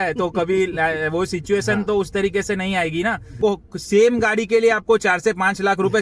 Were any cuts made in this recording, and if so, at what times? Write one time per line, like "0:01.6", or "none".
0:03.3